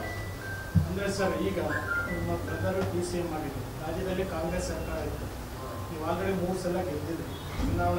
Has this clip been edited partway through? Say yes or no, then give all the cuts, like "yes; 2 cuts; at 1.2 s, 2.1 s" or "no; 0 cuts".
yes; 1 cut; at 4.1 s